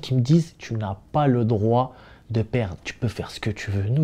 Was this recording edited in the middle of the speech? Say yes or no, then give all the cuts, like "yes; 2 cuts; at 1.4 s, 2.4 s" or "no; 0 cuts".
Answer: yes; 1 cut; at 2.8 s